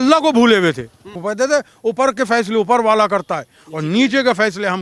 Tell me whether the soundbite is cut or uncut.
cut